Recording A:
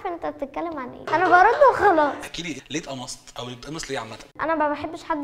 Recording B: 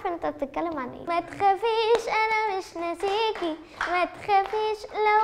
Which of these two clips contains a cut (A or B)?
B